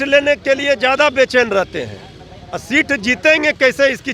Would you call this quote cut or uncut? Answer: uncut